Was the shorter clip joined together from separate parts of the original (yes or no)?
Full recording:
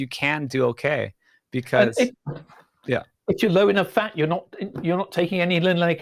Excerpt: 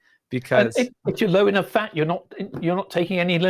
yes